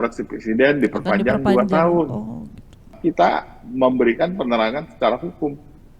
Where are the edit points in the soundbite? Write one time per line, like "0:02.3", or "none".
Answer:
0:02.9